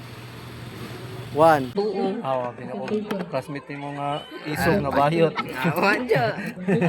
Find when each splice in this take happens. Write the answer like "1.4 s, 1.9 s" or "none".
1.7 s